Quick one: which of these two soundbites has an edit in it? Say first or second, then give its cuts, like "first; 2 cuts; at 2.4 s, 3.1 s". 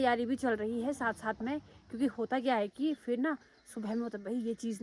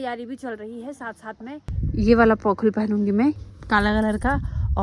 second; 2 cuts; at 1.7 s, 3.5 s